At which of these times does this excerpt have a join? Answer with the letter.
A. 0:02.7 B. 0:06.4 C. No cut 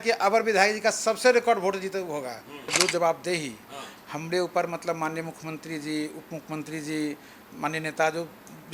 A